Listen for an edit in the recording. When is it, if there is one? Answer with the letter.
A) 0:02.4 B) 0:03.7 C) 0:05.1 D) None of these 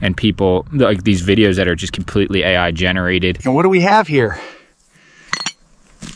D